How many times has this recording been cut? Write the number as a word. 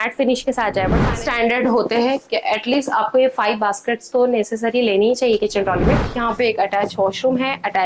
two